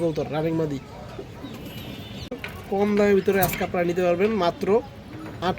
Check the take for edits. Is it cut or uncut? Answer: cut